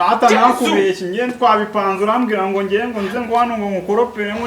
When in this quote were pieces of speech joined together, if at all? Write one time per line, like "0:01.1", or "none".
none